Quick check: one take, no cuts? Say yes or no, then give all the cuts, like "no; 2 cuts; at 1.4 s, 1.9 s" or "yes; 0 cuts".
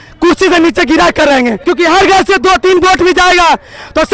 no; 1 cut; at 1.6 s